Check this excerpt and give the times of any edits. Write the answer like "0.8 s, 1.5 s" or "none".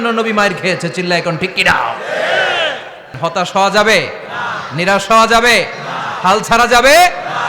3.1 s